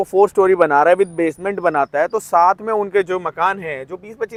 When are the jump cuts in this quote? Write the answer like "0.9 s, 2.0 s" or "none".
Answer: none